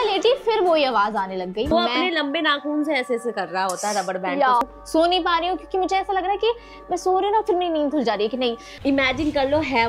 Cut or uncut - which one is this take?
cut